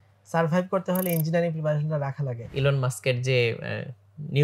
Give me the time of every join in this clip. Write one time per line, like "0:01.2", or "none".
0:02.5